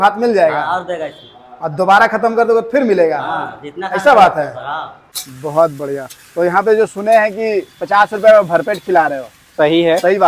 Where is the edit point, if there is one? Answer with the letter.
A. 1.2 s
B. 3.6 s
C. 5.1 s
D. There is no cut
C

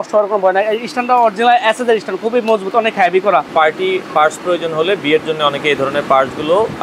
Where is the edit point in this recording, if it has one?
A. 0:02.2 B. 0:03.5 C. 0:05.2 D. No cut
B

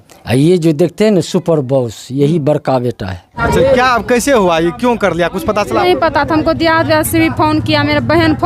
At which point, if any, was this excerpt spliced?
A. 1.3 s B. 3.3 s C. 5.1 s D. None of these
B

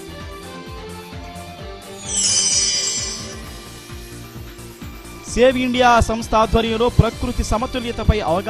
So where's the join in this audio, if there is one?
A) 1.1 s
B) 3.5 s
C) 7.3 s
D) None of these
A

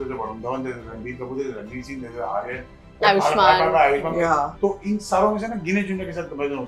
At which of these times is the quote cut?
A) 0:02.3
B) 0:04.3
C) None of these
B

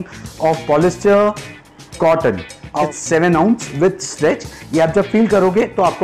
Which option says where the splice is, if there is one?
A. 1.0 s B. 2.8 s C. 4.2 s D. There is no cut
B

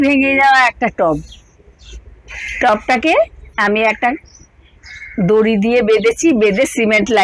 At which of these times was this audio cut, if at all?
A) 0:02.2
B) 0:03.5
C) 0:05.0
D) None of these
D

